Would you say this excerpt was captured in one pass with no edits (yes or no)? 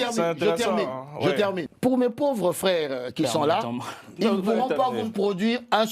no